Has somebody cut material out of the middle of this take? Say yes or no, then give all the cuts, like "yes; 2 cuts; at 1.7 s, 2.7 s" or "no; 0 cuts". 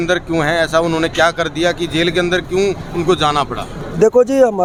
no; 0 cuts